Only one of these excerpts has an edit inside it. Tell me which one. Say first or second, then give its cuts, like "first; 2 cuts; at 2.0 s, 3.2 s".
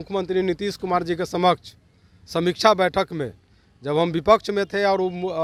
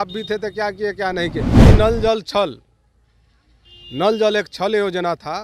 second; 1 cut; at 1.7 s